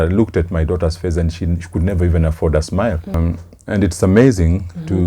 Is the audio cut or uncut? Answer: cut